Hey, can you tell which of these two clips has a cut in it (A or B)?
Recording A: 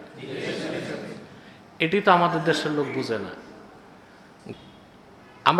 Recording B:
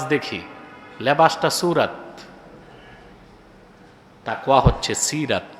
A